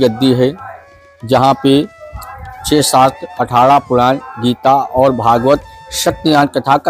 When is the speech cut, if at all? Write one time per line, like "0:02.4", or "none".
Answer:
none